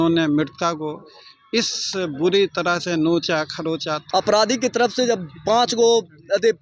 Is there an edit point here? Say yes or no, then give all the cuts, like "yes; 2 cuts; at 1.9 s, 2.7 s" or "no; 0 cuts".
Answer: yes; 1 cut; at 3.9 s